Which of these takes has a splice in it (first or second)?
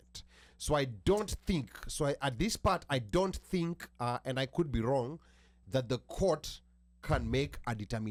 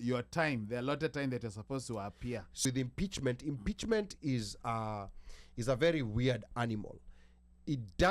second